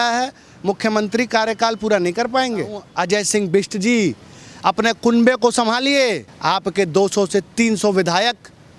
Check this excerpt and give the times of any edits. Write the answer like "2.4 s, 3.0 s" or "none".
2.8 s, 6.3 s